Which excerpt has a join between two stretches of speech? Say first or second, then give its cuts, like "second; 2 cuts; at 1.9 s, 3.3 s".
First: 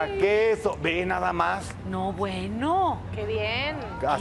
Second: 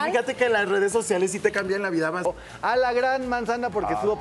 second; 1 cut; at 2.2 s